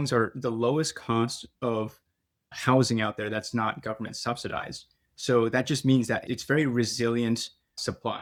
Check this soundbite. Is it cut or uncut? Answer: uncut